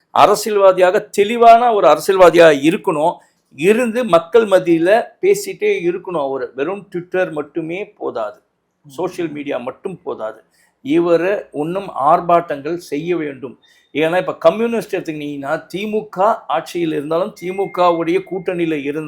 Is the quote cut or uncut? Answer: uncut